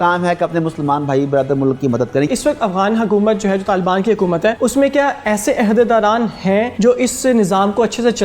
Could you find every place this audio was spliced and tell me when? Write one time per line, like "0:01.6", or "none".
0:02.3
0:04.6
0:06.7